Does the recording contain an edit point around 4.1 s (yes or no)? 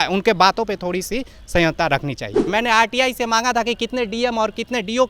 no